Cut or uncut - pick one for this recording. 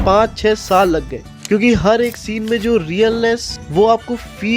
cut